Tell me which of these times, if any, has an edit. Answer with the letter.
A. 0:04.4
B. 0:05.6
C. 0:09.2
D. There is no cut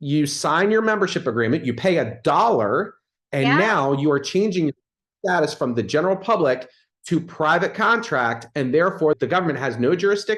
C